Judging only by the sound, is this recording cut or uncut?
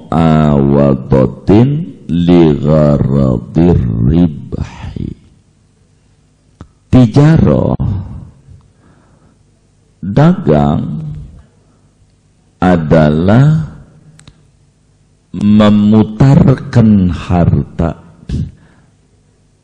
uncut